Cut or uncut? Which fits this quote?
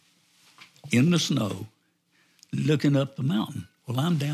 uncut